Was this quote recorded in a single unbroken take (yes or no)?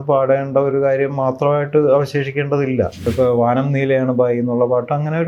no